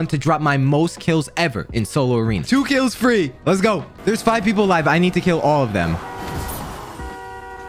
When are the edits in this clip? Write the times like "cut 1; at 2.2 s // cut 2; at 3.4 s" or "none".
none